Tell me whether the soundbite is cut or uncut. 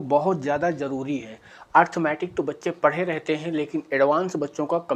uncut